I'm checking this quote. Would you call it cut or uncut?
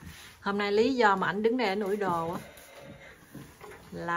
uncut